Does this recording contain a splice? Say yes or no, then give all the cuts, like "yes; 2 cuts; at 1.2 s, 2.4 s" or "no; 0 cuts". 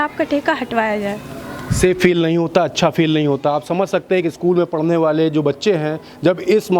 no; 0 cuts